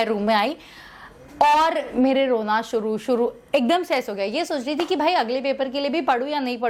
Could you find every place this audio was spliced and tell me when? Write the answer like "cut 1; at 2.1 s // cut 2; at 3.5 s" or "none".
none

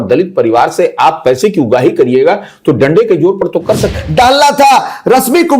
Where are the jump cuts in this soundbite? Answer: cut 1; at 3.9 s

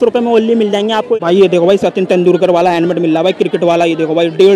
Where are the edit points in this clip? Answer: cut 1; at 1.1 s

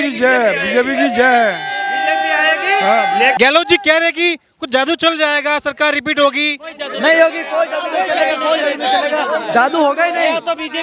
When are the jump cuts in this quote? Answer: cut 1; at 3.4 s

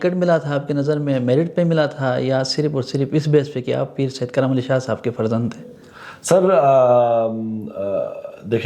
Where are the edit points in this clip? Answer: none

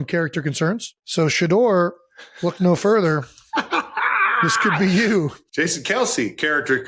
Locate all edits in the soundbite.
cut 1; at 1.0 s // cut 2; at 5.4 s

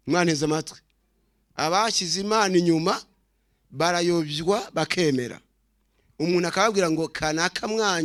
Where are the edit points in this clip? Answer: none

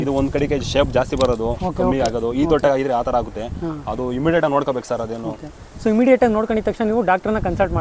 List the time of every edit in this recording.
none

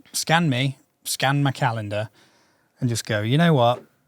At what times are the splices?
none

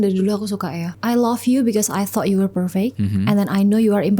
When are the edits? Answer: cut 1; at 0.9 s // cut 2; at 3.0 s

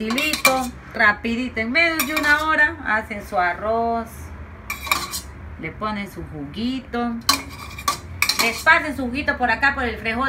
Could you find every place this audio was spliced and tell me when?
cut 1; at 1.0 s

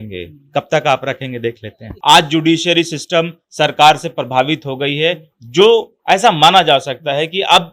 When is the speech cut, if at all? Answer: cut 1; at 1.9 s

